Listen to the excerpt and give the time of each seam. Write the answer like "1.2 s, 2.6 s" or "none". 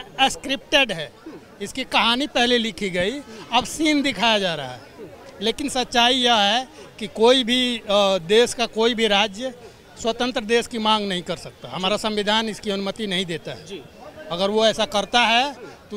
none

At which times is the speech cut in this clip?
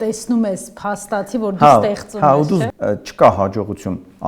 2.7 s

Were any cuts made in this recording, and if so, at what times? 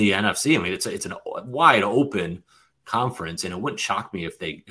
none

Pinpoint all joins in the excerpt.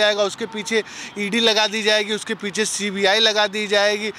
none

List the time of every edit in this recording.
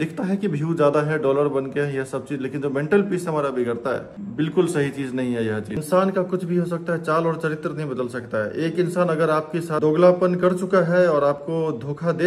4.2 s, 5.8 s, 9.8 s

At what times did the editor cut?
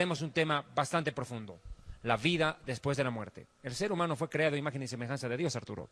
3.3 s

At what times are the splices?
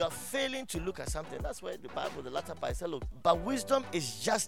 3.1 s

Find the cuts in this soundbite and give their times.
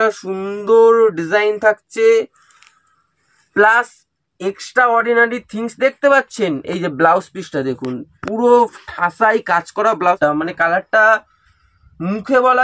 10.0 s

